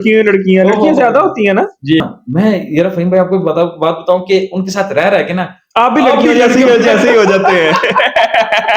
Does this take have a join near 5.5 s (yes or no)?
no